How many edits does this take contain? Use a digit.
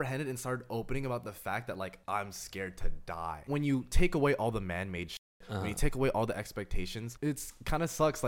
3